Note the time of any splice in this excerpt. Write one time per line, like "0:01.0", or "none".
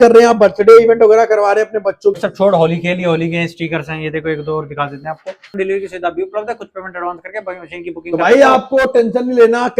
0:02.2
0:05.6